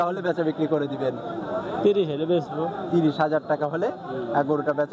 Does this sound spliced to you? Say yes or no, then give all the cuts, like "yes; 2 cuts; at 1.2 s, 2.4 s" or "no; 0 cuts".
no; 0 cuts